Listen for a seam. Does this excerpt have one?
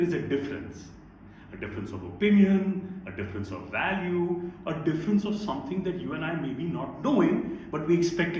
no; 0 cuts

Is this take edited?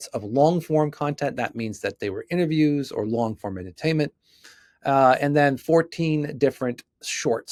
no; 0 cuts

